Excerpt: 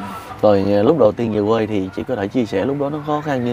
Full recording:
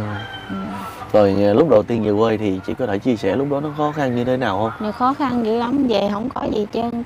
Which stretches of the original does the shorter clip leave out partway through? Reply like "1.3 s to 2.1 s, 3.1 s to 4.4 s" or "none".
none